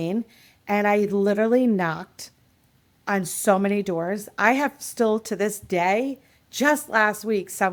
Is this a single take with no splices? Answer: yes; 0 cuts

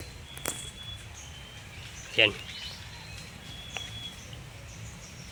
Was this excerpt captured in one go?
yes; 0 cuts

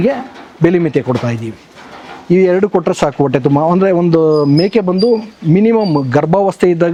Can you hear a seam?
no; 0 cuts

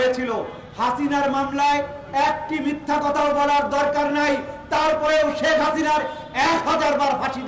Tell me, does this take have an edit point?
no; 0 cuts

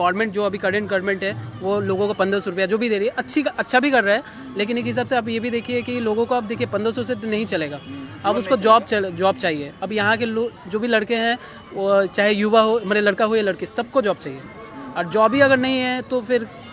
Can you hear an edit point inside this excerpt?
no; 0 cuts

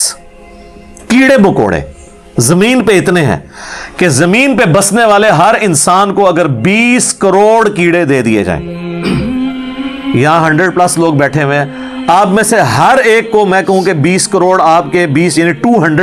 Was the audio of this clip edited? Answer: no; 0 cuts

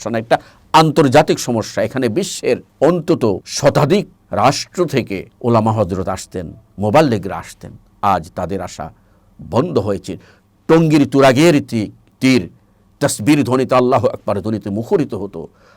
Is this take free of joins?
no; 4 cuts; at 2.7 s, 3.5 s, 4.2 s, 5.3 s

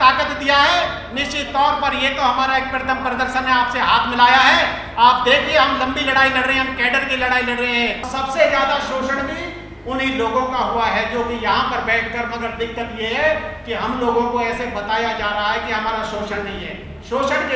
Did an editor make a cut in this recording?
yes; 1 cut; at 8.1 s

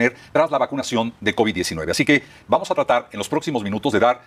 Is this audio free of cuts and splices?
yes; 0 cuts

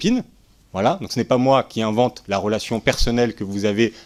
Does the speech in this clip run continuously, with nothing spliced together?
yes; 0 cuts

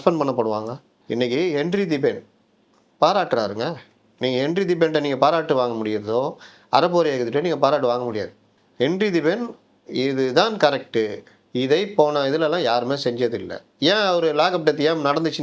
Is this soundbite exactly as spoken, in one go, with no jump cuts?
yes; 0 cuts

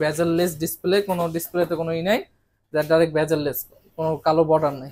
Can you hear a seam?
no; 0 cuts

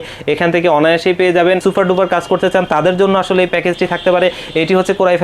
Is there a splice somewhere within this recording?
yes; 1 cut; at 1.6 s

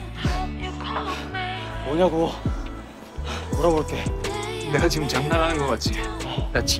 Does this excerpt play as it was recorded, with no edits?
no; 1 cut; at 4.3 s

